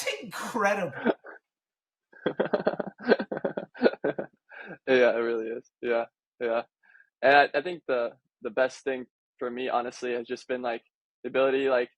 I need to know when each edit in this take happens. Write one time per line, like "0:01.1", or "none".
none